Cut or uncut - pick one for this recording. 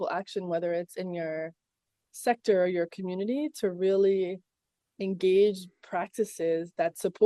uncut